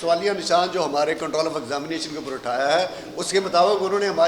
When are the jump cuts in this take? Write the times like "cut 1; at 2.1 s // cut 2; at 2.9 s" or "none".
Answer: none